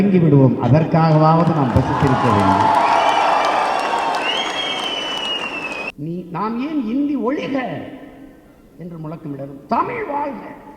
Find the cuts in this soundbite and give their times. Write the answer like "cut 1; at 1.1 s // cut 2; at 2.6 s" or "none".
cut 1; at 5.9 s